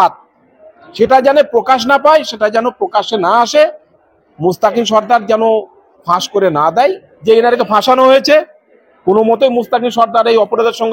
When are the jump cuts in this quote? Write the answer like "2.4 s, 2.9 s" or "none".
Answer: 7.1 s